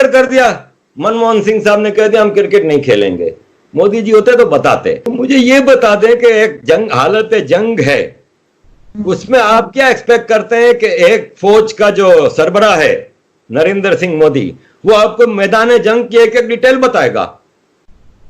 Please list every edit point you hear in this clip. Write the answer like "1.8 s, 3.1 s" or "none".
5.1 s